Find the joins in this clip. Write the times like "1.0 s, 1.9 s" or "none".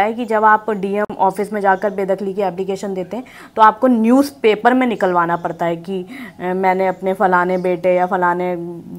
none